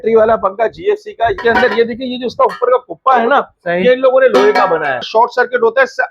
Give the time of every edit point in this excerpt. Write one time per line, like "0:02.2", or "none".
0:01.4
0:05.1